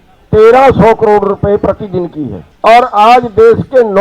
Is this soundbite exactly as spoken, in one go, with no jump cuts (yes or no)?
no